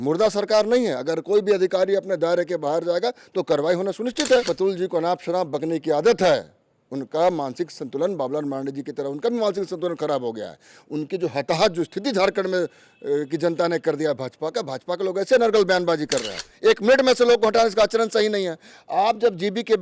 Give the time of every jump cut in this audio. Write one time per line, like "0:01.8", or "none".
0:04.5
0:16.4